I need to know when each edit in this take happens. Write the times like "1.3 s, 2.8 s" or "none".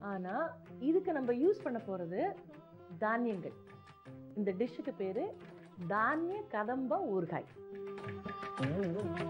7.8 s